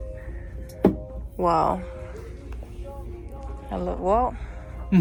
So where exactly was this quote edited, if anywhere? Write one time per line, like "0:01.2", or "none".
none